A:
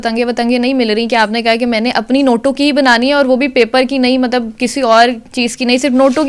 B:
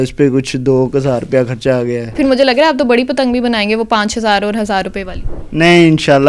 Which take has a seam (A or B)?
B